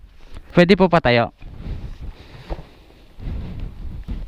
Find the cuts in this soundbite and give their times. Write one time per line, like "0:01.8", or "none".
0:02.3